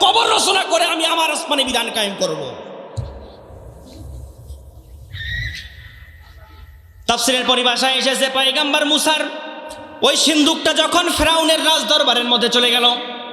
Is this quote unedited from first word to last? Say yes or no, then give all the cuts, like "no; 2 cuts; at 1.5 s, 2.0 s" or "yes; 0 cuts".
yes; 0 cuts